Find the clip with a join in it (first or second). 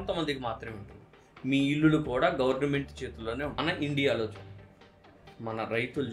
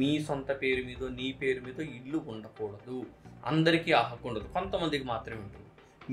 first